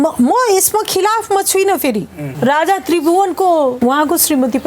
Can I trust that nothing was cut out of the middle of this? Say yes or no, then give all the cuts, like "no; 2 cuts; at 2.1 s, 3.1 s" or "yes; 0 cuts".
no; 2 cuts; at 2.2 s, 3.8 s